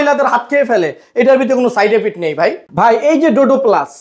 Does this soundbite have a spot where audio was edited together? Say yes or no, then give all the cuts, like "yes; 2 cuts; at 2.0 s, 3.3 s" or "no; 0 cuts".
no; 0 cuts